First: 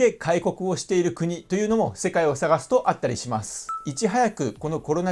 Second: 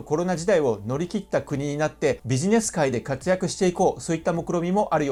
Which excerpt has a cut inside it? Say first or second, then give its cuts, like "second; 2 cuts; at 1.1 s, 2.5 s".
first; 1 cut; at 3.8 s